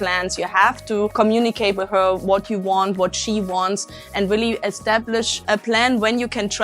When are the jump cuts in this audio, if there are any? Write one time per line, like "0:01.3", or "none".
0:01.1
0:05.4